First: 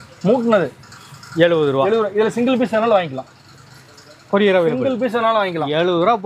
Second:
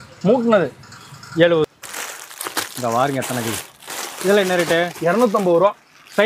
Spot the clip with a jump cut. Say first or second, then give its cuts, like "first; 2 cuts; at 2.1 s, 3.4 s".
second; 1 cut; at 1.6 s